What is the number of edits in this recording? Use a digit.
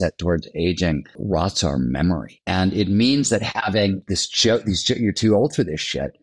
3